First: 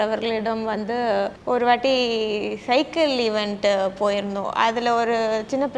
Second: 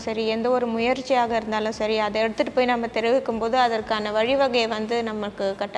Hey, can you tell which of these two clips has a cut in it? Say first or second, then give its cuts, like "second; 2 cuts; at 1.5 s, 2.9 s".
first; 1 cut; at 1.4 s